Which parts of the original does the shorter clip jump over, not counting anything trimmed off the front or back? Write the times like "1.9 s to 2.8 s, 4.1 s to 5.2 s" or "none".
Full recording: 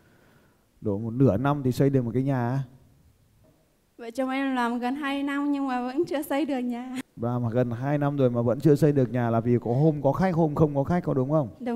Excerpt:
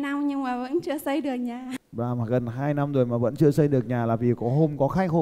none